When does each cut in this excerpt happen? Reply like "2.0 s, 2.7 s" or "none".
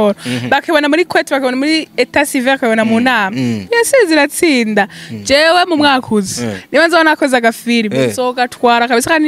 none